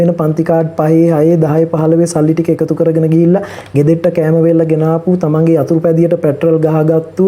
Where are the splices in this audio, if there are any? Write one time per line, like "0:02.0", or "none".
none